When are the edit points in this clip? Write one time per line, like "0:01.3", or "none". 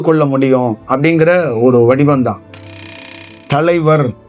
0:02.8